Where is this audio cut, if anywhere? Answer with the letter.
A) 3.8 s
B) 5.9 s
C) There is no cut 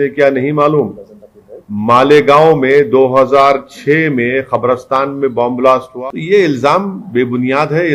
B